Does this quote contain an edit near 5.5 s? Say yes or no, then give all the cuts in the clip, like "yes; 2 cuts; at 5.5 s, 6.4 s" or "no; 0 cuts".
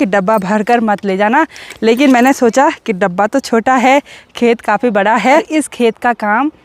yes; 1 cut; at 5.5 s